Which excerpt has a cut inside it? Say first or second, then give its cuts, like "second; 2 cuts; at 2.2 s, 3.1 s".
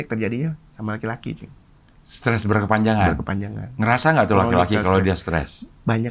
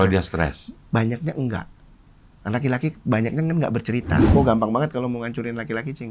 second; 1 cut; at 4.3 s